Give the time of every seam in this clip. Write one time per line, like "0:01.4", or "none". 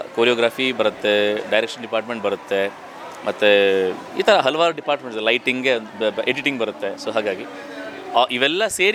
none